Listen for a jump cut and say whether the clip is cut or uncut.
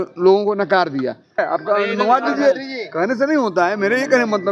cut